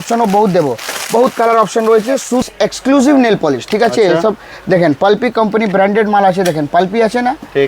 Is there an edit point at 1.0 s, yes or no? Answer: no